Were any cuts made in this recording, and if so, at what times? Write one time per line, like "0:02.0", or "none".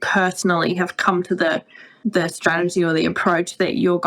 0:01.9